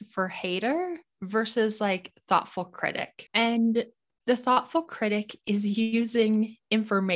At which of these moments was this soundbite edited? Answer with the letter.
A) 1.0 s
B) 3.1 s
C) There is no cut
B